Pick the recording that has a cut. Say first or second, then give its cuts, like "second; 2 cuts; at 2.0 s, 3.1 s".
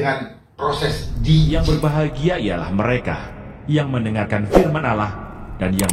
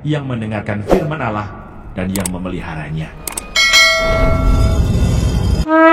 first; 1 cut; at 1.5 s